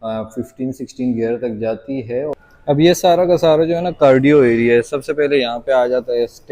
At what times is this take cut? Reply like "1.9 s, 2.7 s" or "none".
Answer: 2.3 s